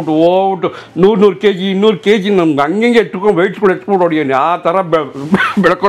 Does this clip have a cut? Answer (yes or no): no